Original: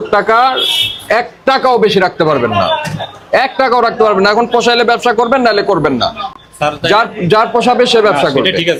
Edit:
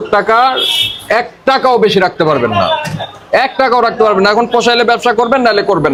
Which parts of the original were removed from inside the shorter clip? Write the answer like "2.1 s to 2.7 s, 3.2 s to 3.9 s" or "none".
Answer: none